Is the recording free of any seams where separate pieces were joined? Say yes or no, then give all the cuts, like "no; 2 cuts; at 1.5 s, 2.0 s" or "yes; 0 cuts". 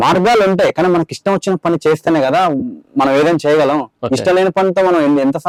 yes; 0 cuts